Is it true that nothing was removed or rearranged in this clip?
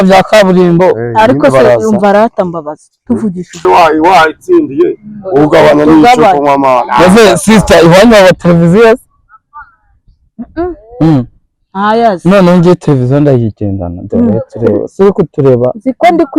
no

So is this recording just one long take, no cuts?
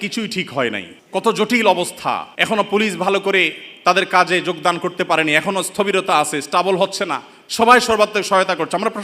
no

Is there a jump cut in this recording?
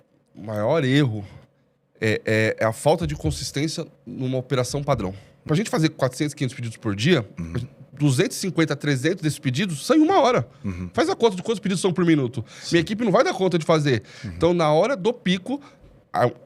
yes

